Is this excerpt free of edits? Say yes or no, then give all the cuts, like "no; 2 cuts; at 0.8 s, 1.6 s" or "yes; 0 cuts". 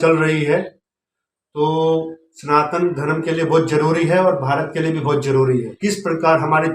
no; 1 cut; at 5.7 s